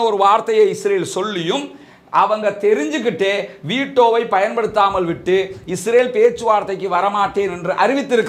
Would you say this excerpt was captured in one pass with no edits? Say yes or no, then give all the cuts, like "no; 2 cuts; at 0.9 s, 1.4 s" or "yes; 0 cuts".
yes; 0 cuts